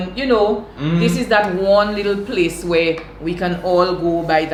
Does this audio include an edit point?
no; 0 cuts

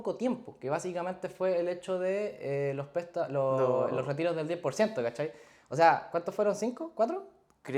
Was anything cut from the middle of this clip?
no; 0 cuts

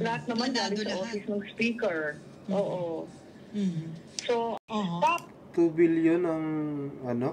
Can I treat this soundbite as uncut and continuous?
no; 1 cut; at 4.6 s

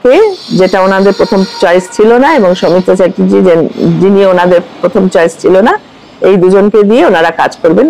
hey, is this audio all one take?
yes; 0 cuts

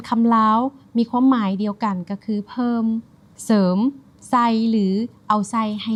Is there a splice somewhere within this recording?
no; 0 cuts

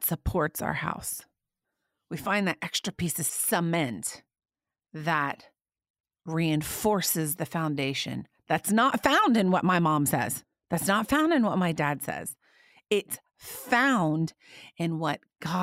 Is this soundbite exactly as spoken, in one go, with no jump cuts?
yes; 0 cuts

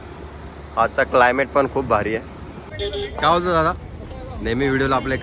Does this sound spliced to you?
yes; 1 cut; at 2.7 s

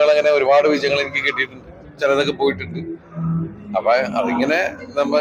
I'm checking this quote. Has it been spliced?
no; 0 cuts

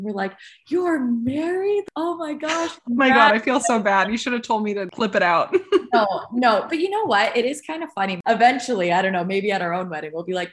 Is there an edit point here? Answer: yes; 3 cuts; at 1.9 s, 4.9 s, 8.2 s

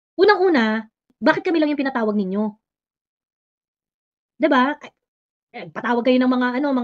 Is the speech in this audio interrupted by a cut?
yes; 1 cut; at 1.1 s

